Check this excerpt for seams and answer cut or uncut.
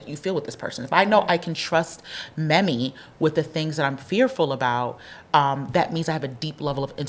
uncut